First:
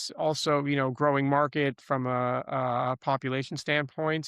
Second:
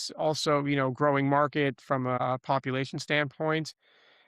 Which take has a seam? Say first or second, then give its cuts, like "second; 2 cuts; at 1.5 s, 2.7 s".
second; 1 cut; at 2.2 s